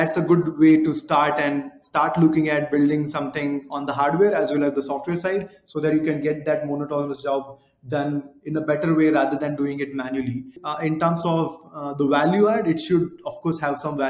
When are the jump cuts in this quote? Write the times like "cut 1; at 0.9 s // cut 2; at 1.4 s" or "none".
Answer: cut 1; at 10.6 s